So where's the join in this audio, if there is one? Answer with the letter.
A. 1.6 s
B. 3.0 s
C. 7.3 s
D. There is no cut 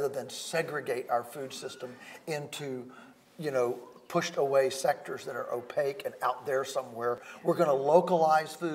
C